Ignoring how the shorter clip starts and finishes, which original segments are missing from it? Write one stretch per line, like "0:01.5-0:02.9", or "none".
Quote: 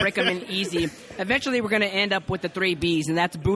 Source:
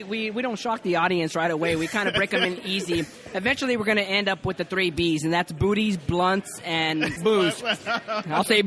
none

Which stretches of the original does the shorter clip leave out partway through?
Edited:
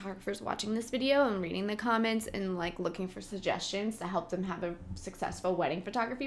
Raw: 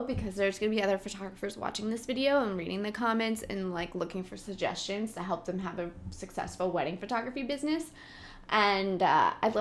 none

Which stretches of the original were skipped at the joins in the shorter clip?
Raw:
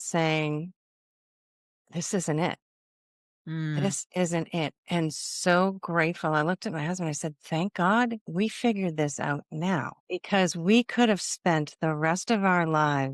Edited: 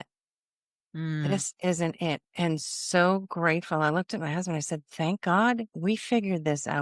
none

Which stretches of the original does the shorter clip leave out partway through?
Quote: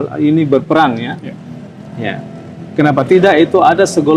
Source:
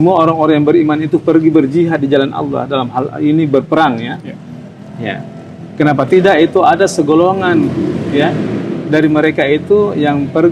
none

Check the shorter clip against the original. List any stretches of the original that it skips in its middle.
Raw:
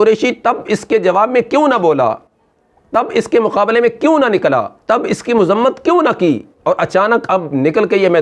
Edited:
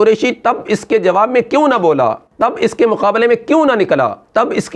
0:02.2-0:02.8

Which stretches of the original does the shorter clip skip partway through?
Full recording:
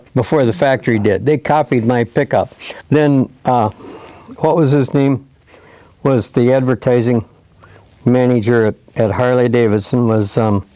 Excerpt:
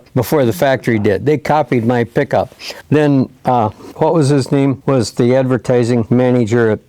0:03.8-0:04.2
0:05.2-0:06.0
0:07.2-0:08.0

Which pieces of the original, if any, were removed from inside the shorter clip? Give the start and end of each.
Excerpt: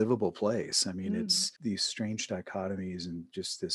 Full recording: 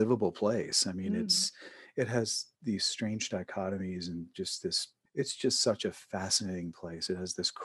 0:01.5-0:02.5

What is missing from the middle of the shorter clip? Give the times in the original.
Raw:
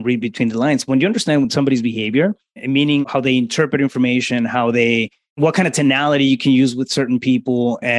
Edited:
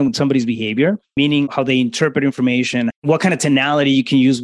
0:02.4-0:02.6
0:04.5-0:05.3

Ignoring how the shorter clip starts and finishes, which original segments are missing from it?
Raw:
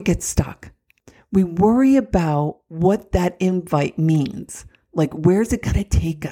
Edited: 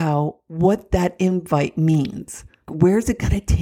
0:04.9-0:05.1

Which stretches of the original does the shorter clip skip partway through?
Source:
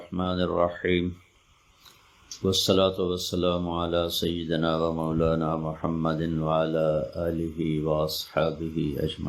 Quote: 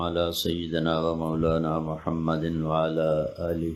none

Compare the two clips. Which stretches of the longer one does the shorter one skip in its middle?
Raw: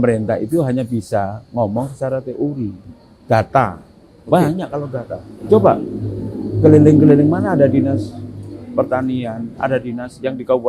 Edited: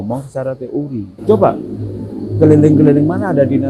0:02.8-0:05.3

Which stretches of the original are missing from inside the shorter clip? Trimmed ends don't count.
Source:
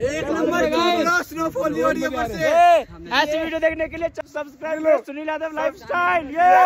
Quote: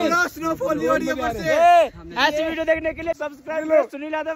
0:04.2-0:04.4

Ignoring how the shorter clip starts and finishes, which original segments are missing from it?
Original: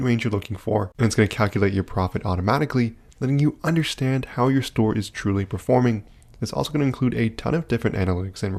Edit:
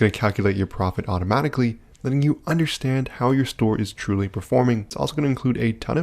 0:06.1-0:06.5

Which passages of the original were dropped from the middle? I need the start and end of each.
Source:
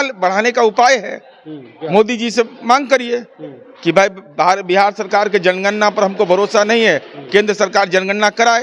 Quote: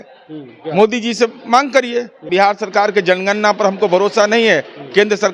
0:03.4-0:04.6

